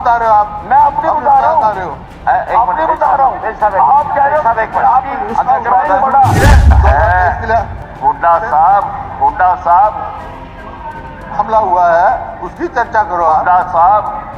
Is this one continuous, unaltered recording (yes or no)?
no